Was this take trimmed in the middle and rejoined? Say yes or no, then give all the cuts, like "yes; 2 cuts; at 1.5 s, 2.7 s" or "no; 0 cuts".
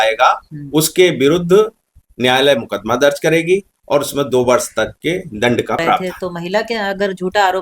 yes; 1 cut; at 6.0 s